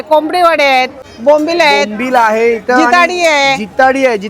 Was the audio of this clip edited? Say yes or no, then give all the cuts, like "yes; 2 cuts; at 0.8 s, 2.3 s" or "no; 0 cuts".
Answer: yes; 1 cut; at 1.1 s